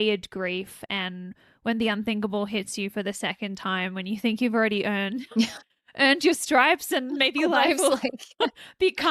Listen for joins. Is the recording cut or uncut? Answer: uncut